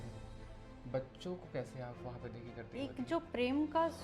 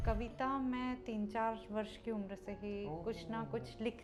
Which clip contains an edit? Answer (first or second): first